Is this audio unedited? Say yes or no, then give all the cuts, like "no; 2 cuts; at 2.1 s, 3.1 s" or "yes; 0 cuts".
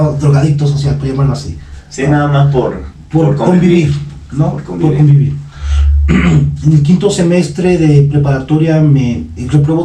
yes; 0 cuts